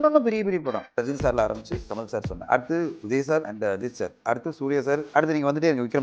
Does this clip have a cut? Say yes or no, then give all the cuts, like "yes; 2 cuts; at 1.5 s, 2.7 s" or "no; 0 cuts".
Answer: yes; 4 cuts; at 1.0 s, 2.3 s, 3.5 s, 5.1 s